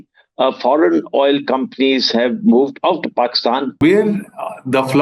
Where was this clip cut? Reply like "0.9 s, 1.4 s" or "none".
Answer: 3.8 s